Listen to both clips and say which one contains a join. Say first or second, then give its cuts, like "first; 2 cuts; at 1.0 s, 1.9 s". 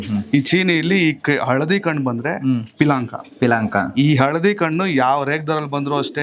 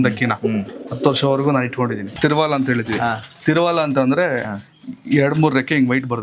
second; 1 cut; at 2.1 s